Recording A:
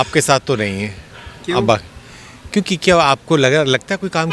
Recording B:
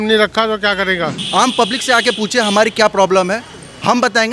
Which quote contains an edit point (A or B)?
B